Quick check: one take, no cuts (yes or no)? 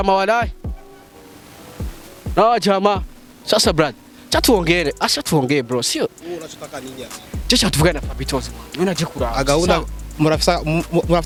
yes